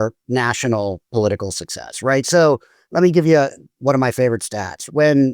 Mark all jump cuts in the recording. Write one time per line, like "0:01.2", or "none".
0:02.8
0:03.7